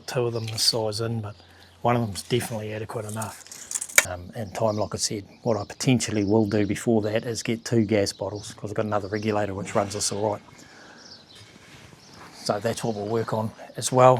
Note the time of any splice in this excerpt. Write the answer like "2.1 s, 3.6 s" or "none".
4.1 s